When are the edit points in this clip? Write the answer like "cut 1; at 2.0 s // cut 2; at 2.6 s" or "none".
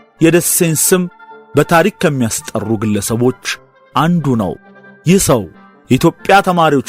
cut 1; at 4.8 s

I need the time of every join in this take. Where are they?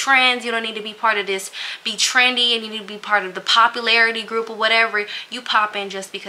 none

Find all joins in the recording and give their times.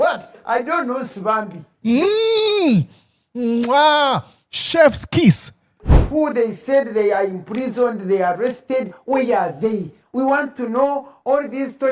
cut 1; at 5.9 s

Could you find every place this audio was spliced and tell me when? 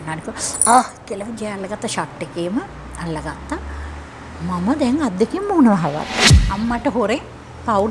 cut 1; at 6.4 s

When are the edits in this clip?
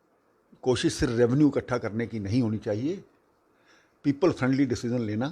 none

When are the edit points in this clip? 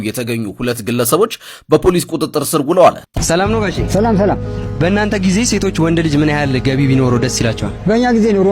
cut 1; at 3.0 s

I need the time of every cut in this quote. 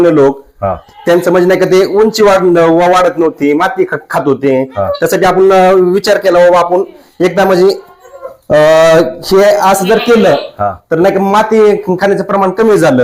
none

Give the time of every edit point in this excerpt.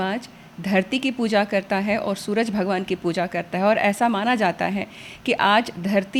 none

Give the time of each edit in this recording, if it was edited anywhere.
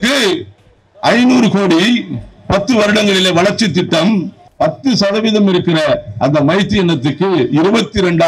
cut 1; at 4.5 s

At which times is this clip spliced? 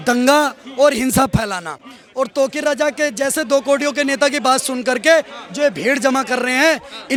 none

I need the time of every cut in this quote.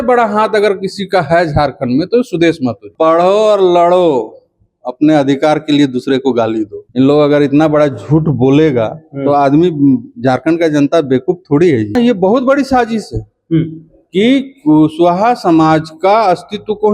cut 1; at 2.8 s // cut 2; at 6.8 s // cut 3; at 11.9 s

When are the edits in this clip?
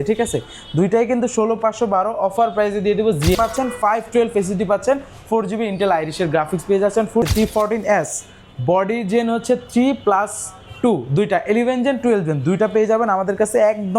cut 1; at 3.4 s // cut 2; at 7.2 s

